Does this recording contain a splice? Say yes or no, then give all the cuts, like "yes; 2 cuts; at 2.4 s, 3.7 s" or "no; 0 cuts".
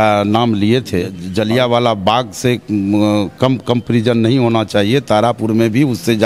yes; 1 cut; at 1.2 s